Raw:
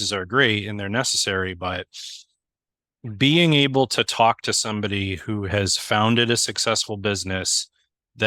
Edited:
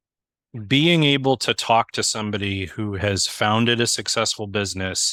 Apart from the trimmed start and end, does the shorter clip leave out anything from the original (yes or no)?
no